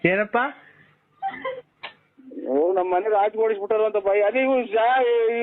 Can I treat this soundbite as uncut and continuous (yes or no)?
yes